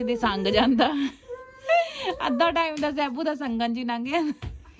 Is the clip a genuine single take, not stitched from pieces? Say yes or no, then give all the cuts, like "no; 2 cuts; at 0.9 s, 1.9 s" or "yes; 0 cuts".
yes; 0 cuts